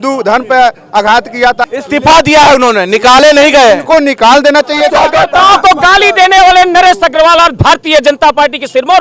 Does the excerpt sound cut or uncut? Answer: cut